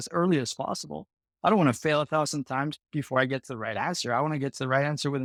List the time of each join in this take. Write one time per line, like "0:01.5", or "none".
none